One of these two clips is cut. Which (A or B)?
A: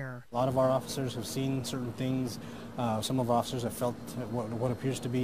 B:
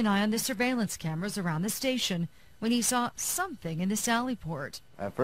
B